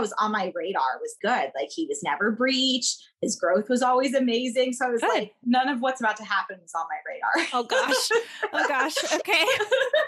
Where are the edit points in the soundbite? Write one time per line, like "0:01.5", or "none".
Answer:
0:01.1